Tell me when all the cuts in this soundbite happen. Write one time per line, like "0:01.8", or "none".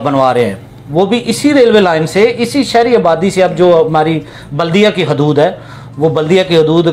none